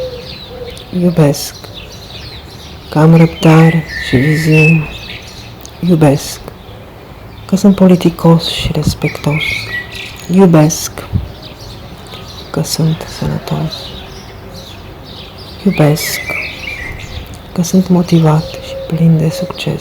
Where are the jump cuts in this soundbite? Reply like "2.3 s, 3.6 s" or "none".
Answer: 13.8 s, 15.6 s, 16.0 s, 17.5 s

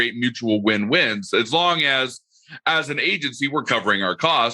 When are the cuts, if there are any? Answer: none

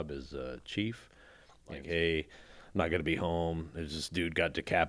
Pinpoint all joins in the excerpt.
1.8 s

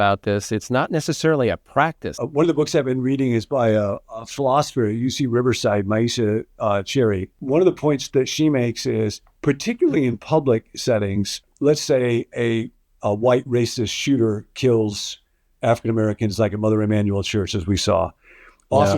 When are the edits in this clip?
2.1 s, 7.3 s, 11.4 s

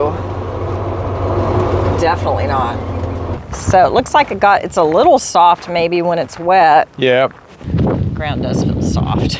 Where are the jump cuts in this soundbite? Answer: 3.5 s, 7.8 s

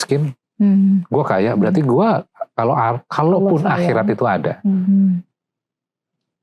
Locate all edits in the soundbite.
none

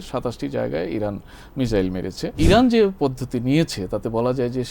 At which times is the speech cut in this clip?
2.3 s

